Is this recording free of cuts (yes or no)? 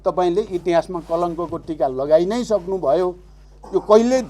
yes